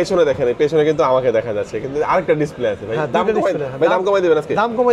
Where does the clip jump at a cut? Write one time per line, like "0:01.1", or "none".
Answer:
none

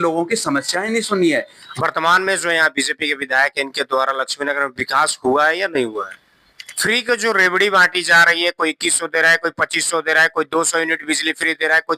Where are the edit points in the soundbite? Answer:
0:01.6
0:06.6

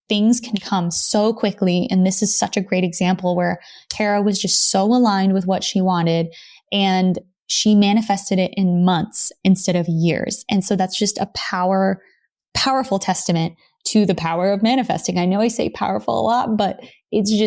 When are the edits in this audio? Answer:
none

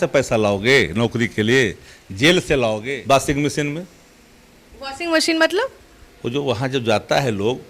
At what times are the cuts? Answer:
0:02.8

